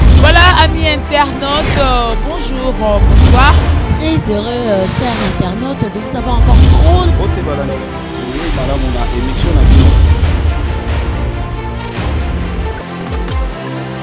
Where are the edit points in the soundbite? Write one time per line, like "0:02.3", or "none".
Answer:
none